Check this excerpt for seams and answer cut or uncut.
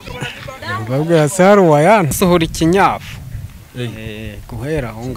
cut